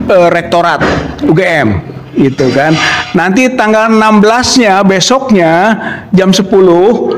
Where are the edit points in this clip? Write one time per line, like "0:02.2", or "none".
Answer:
none